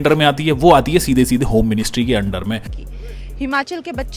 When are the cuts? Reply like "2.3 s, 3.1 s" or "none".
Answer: none